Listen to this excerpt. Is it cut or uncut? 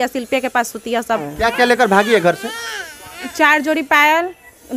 cut